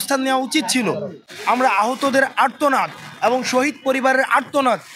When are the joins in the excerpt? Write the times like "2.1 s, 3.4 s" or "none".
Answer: 1.2 s